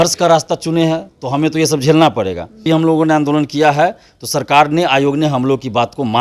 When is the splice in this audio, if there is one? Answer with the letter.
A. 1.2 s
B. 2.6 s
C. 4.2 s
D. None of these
B